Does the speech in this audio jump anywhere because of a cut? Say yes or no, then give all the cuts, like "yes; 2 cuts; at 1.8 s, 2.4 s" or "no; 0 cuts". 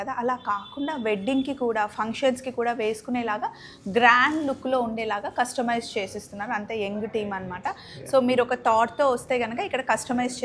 no; 0 cuts